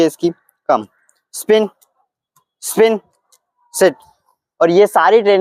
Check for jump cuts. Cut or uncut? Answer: uncut